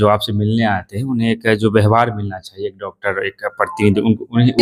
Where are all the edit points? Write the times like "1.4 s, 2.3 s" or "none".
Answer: none